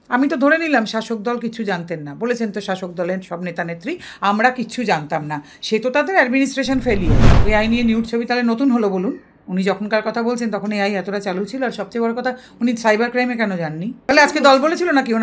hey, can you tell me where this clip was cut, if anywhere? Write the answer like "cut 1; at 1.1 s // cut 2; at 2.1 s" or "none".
cut 1; at 7.4 s // cut 2; at 14.1 s

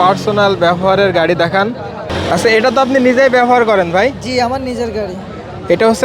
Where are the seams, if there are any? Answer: cut 1; at 2.1 s

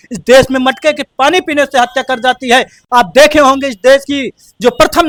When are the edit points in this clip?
none

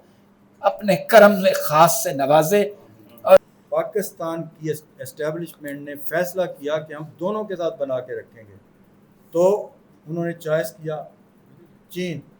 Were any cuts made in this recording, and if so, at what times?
cut 1; at 3.4 s

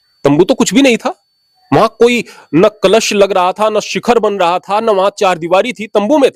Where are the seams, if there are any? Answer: none

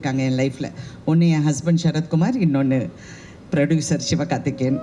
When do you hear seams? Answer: none

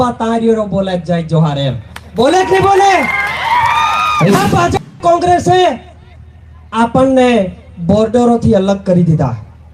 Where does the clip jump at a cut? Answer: cut 1; at 4.3 s

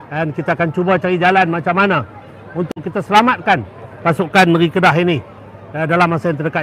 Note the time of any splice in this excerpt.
none

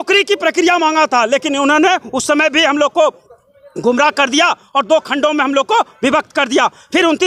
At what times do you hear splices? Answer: none

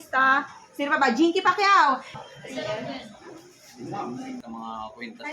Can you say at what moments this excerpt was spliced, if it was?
cut 1; at 2.1 s // cut 2; at 4.4 s

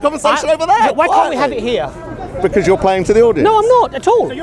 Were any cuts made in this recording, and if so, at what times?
none

